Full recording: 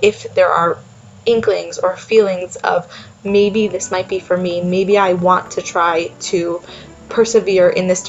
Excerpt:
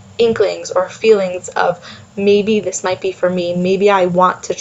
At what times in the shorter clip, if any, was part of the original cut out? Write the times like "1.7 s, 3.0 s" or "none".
none